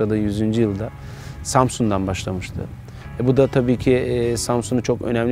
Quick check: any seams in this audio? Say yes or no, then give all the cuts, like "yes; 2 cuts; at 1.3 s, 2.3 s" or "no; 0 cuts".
no; 0 cuts